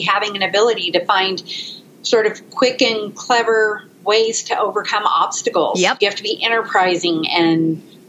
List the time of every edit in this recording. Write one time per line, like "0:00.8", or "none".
none